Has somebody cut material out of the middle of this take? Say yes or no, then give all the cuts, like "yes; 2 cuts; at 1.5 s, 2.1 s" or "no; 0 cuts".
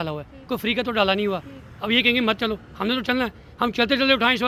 no; 0 cuts